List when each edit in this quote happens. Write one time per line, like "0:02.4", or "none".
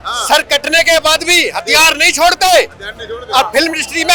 none